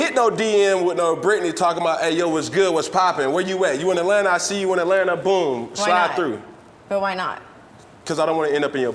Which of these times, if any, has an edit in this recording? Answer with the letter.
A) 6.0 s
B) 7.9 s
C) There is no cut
B